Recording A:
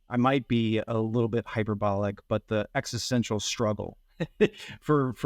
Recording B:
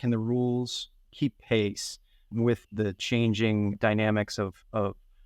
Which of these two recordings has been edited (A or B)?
B